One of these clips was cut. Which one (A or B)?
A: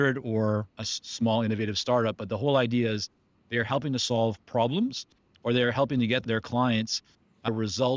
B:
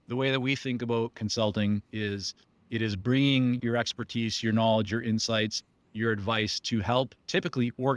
B